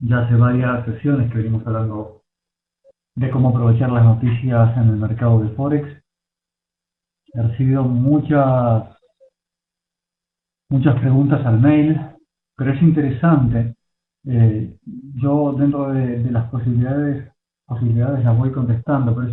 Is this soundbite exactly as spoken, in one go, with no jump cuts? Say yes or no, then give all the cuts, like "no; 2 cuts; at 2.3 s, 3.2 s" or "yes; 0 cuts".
yes; 0 cuts